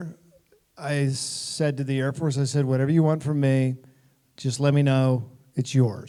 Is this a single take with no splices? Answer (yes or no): yes